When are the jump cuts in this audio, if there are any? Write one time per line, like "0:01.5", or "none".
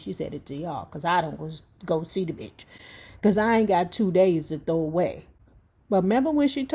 none